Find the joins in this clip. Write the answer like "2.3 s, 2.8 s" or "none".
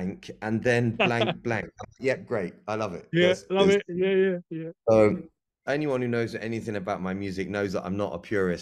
5.6 s